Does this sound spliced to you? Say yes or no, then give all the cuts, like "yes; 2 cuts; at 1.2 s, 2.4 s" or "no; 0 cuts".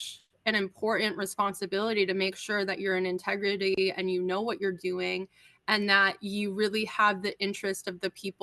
no; 0 cuts